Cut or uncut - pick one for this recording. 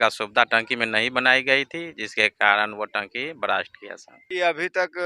cut